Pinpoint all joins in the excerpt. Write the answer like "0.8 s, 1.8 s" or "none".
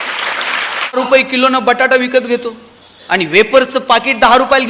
1.0 s